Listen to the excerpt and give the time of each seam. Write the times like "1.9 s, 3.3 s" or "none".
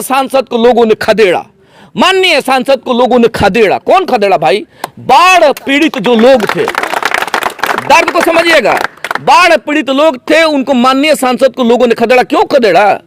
none